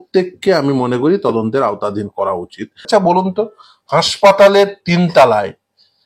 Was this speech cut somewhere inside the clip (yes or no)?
yes